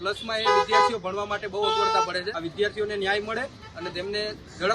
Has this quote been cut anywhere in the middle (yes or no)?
yes